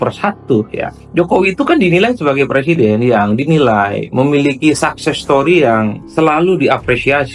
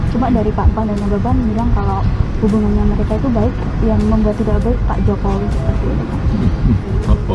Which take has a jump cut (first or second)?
first